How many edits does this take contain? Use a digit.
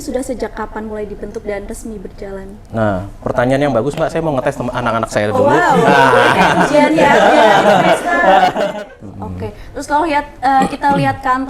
1